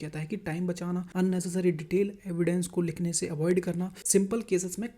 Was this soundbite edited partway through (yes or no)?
yes